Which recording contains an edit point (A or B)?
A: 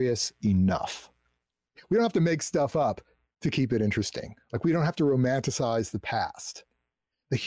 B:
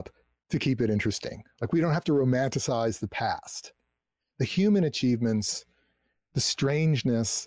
A